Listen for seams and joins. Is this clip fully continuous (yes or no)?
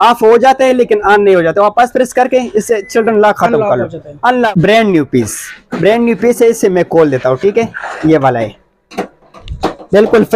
no